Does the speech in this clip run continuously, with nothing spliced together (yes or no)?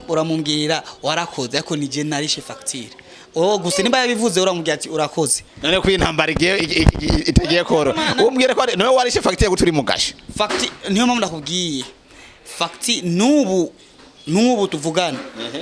yes